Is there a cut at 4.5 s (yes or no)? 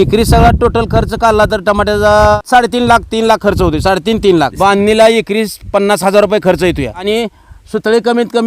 yes